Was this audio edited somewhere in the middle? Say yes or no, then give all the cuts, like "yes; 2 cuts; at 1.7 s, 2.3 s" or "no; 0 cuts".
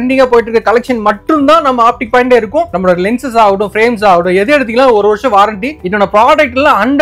yes; 2 cuts; at 2.7 s, 5.8 s